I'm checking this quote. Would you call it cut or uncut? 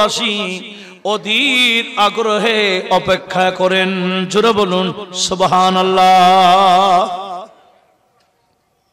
uncut